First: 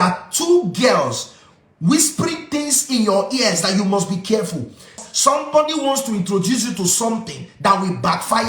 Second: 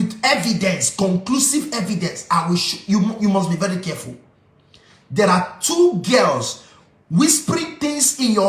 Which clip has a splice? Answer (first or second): first